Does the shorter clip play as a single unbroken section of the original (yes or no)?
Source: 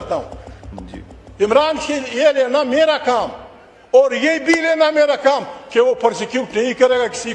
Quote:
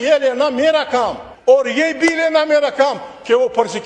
no